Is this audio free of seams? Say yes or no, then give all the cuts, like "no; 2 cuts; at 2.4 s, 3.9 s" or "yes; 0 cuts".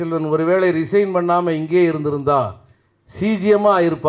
yes; 0 cuts